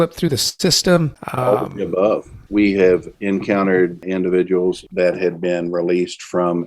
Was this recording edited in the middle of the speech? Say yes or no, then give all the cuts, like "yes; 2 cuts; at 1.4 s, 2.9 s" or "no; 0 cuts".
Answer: yes; 5 cuts; at 1.2 s, 2.3 s, 3.1 s, 4.0 s, 4.8 s